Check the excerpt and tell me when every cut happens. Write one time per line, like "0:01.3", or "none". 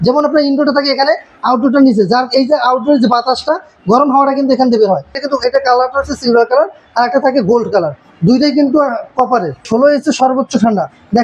0:05.2
0:09.7